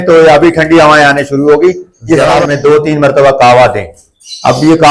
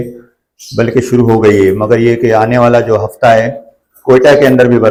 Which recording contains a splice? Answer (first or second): first